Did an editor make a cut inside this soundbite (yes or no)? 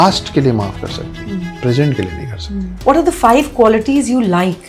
yes